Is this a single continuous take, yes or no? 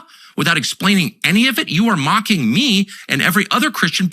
no